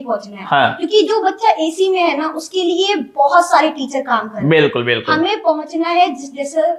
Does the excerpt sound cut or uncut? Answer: uncut